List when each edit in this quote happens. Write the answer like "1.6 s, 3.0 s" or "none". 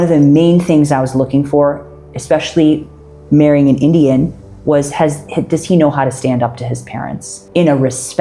none

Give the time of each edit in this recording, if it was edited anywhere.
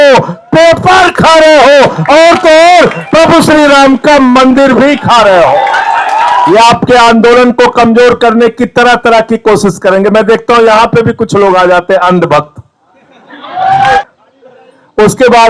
6.5 s, 14.0 s

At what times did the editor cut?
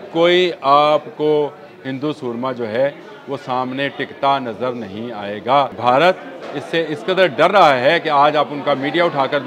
5.8 s

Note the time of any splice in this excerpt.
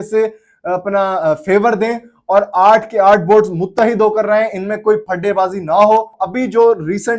6.2 s

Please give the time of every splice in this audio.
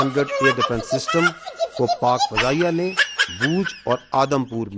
none

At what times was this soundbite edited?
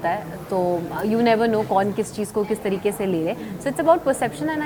none

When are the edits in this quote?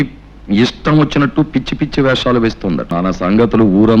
2.9 s

